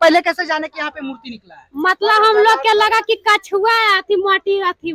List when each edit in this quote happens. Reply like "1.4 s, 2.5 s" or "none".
none